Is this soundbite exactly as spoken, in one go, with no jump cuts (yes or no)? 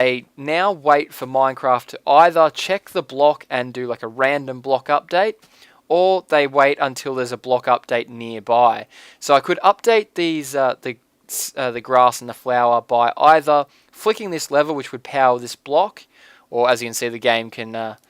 no